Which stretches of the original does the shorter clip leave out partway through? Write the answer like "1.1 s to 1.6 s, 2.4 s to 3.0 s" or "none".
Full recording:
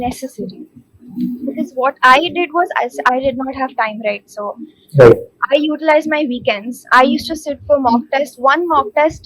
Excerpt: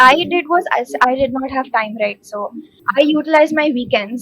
4.8 s to 5.3 s

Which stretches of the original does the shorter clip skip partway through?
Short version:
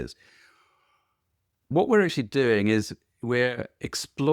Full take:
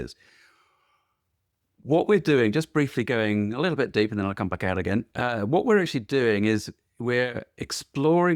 1.7 s to 5.5 s

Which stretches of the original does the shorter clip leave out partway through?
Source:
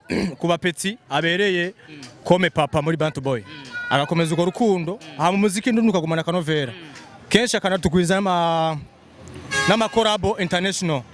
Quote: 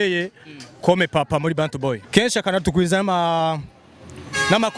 3.4 s to 7.2 s

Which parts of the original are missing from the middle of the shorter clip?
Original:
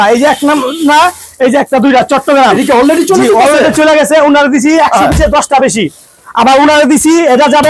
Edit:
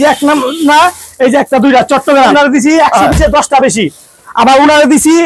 2.5 s to 4.3 s

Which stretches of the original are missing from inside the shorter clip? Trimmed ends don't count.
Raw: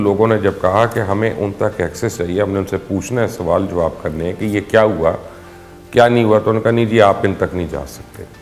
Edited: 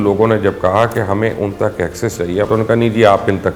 2.5 s to 6.4 s

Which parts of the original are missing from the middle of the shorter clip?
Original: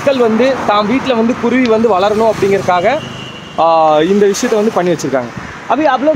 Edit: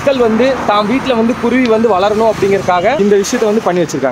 3.0 s to 4.1 s

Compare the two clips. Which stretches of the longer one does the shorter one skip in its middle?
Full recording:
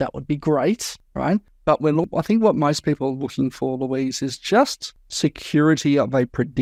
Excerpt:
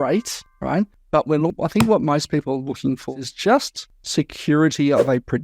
3.7 s to 4.2 s

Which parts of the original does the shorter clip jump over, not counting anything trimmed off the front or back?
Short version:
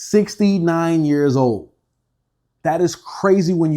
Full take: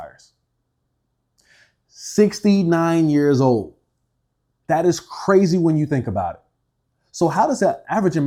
none

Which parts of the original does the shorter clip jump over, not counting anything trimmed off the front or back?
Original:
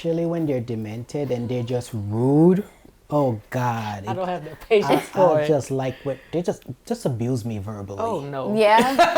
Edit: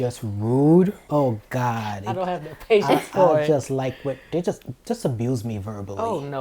2.7 s to 3.0 s

